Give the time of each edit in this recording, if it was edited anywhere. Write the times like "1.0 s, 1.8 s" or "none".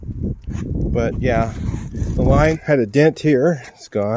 2.6 s